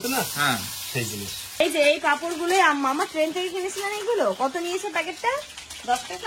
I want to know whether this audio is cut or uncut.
cut